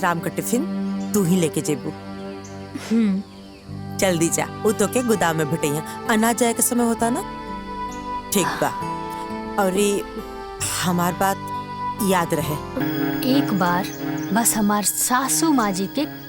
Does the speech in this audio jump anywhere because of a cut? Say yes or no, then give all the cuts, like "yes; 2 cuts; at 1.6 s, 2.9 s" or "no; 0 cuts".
yes; 1 cut; at 12.8 s